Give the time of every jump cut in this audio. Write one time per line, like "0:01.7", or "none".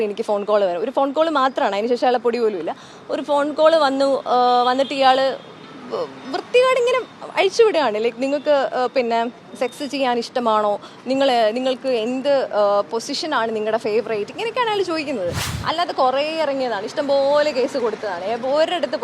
0:15.5